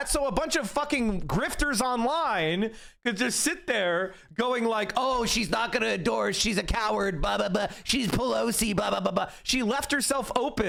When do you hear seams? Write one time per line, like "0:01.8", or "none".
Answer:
none